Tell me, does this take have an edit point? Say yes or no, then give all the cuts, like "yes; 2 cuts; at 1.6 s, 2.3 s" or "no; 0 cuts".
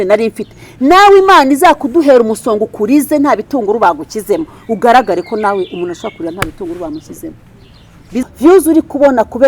yes; 1 cut; at 8.2 s